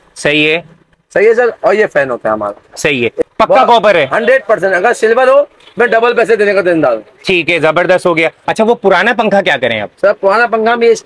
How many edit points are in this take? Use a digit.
2